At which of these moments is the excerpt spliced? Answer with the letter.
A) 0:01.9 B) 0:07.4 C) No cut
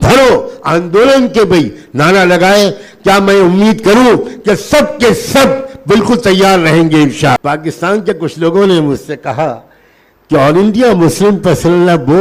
B